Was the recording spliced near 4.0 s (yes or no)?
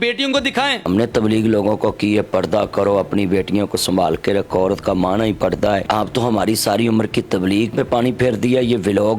no